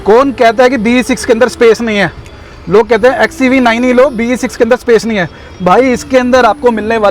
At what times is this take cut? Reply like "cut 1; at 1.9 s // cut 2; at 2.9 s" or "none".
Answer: none